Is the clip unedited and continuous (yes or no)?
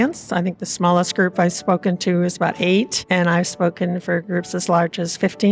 yes